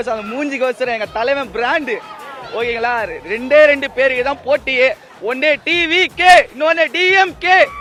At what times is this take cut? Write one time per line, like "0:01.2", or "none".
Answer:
none